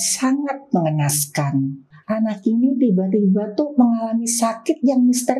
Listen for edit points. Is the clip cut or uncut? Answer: cut